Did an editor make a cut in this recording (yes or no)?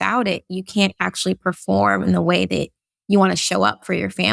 no